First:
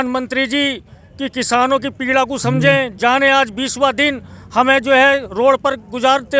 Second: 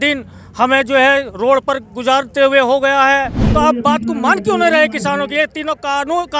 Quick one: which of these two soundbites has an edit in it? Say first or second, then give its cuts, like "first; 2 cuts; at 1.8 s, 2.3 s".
second; 1 cut; at 3.4 s